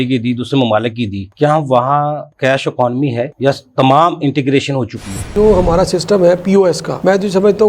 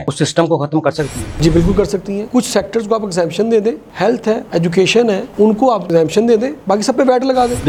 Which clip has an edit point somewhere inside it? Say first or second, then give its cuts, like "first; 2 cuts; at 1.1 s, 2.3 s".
first; 2 cuts; at 1.2 s, 5.2 s